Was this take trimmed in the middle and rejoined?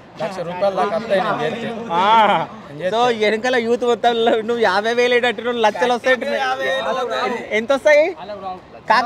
no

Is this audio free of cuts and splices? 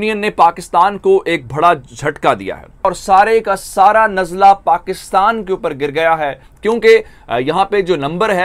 no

